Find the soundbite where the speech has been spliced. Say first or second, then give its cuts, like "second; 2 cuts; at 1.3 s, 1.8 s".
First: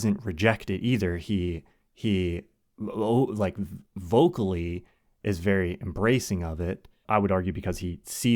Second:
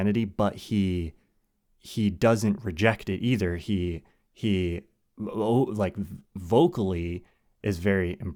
first; 1 cut; at 7.0 s